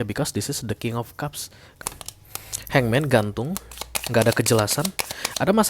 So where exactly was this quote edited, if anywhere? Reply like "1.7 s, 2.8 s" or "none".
1.7 s